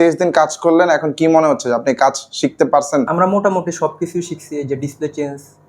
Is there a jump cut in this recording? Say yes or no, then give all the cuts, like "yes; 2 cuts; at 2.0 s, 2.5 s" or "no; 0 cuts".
yes; 1 cut; at 3.1 s